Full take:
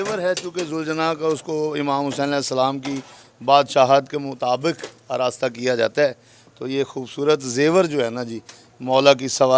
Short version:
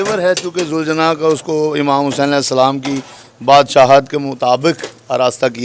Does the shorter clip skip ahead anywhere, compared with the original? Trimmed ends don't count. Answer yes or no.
no